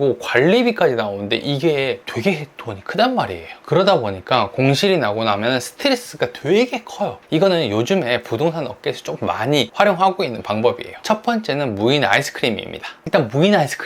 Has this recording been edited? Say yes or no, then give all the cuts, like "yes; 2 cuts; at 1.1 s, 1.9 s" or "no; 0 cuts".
yes; 2 cuts; at 7.2 s, 10.9 s